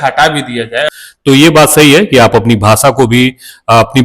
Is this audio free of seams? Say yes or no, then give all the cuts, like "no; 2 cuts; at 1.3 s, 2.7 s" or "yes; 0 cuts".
no; 1 cut; at 0.9 s